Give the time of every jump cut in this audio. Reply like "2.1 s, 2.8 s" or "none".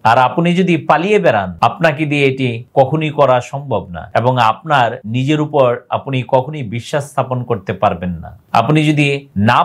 1.5 s